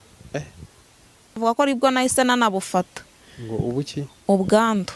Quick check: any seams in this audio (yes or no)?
yes